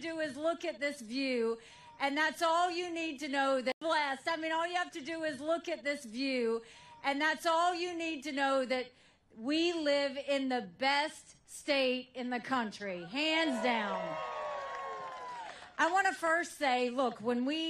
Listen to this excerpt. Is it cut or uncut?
cut